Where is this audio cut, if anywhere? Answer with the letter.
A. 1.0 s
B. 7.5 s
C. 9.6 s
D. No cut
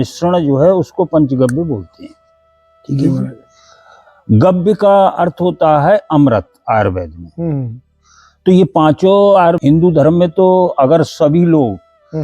C